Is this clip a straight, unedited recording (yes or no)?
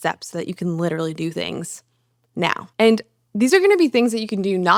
yes